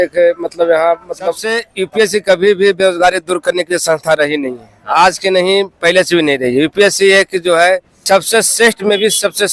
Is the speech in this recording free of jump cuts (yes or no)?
no